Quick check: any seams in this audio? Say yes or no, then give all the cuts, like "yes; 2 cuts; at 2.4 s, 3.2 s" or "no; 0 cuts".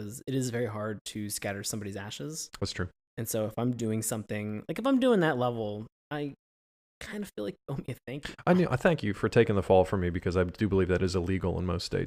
no; 0 cuts